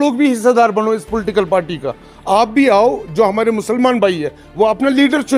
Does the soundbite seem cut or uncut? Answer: uncut